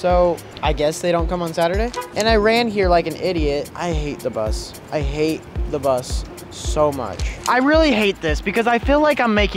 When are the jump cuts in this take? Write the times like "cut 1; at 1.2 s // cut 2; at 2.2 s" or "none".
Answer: cut 1; at 2.0 s // cut 2; at 3.7 s // cut 3; at 7.4 s